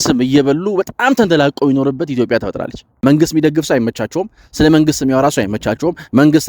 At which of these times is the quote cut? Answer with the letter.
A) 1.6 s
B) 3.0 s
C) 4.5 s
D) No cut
B